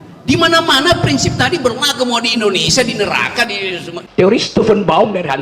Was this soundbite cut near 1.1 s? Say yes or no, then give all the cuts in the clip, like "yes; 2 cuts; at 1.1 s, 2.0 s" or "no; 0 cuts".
no; 1 cut; at 4.0 s